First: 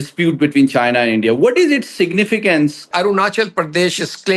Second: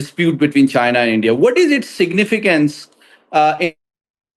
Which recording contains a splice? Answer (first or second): first